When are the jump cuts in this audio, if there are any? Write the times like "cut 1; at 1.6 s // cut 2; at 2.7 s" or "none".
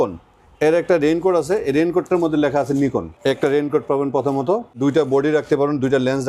cut 1; at 3.1 s // cut 2; at 4.8 s